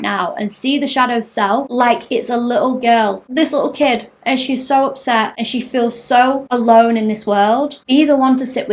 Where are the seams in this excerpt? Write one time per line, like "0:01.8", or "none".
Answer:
0:01.7
0:03.2
0:05.3
0:06.4
0:07.8